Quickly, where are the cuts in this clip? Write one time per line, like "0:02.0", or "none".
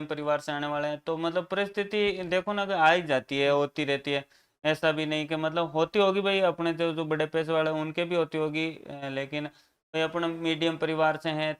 none